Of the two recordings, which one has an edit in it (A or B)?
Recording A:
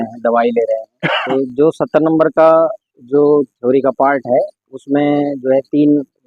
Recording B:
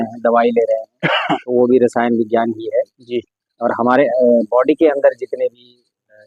A